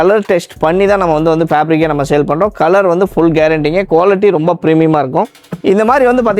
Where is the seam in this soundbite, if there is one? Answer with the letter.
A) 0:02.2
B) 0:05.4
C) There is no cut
B